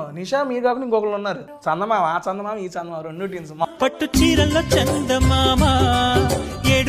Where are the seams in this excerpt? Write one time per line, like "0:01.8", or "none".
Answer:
0:01.5
0:03.7